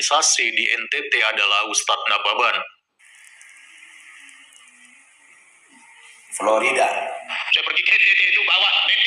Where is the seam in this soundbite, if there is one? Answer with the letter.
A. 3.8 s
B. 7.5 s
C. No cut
B